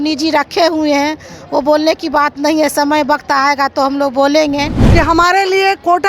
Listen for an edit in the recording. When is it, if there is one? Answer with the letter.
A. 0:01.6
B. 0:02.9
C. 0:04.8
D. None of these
C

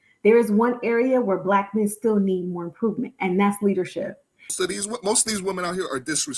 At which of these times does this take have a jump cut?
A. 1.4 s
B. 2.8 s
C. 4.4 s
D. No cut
C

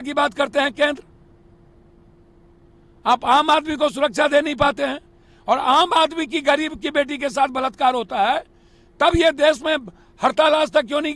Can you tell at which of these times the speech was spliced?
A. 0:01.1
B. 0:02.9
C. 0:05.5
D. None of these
D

